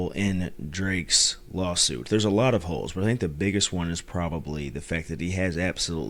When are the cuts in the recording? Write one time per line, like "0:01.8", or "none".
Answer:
none